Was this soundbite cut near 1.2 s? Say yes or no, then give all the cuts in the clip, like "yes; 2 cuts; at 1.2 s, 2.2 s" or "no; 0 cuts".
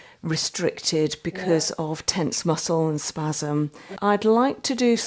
no; 1 cut; at 3.8 s